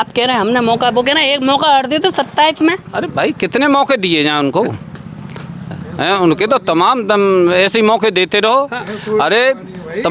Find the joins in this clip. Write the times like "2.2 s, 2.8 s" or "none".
none